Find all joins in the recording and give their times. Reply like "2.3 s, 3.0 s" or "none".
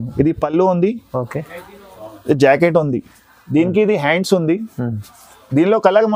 none